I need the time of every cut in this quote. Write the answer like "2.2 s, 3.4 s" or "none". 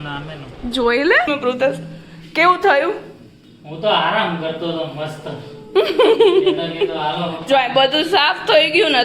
1.3 s